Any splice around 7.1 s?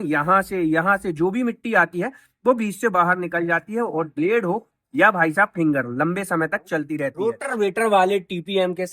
yes; 1 cut; at 7.1 s

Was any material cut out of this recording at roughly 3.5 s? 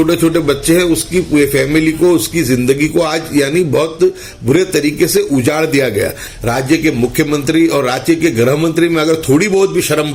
no; 1 cut; at 6.3 s

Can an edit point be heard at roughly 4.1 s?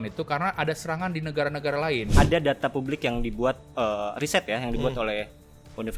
no; 1 cut; at 2.1 s

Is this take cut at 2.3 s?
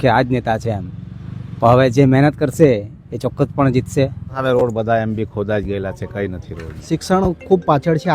no; 2 cuts; at 4.3 s, 6.7 s

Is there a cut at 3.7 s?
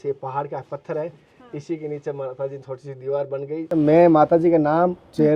yes; 1 cut; at 3.7 s

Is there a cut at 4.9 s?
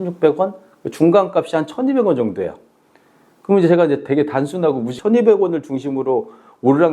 yes; 1 cut; at 4.9 s

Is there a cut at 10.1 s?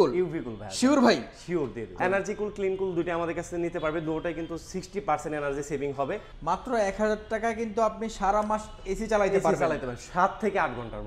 no; 2 cuts; at 1.8 s, 6.3 s

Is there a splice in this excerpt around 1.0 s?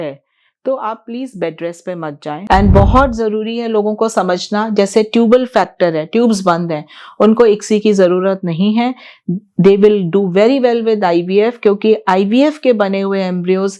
no; 1 cut; at 2.4 s

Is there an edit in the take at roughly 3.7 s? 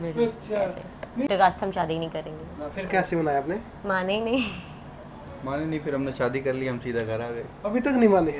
no; 1 cut; at 1.3 s

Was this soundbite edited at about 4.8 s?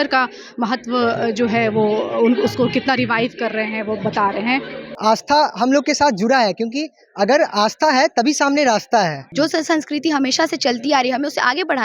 yes; 2 cuts; at 4.8 s, 9.2 s

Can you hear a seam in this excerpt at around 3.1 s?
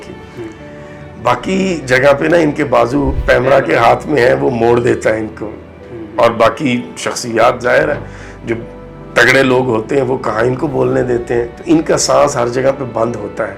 yes; 1 cut; at 3.1 s

